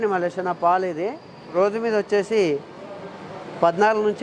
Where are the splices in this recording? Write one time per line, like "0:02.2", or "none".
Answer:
0:01.5